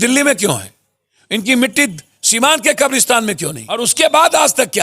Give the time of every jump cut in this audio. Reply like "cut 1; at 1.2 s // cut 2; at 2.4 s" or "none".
cut 1; at 3.6 s

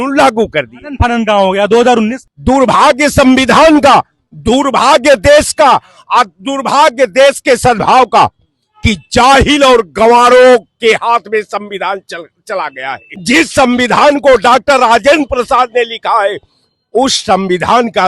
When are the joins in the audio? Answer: cut 1; at 2.3 s // cut 2; at 13.1 s

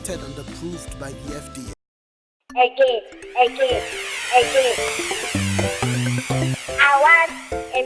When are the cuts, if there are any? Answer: cut 1; at 1.8 s

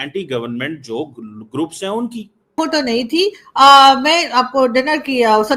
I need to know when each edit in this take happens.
cut 1; at 2.5 s

